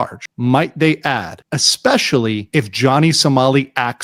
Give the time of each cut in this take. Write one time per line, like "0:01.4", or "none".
none